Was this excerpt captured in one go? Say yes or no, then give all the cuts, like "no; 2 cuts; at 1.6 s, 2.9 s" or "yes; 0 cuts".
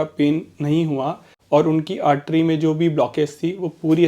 no; 1 cut; at 1.3 s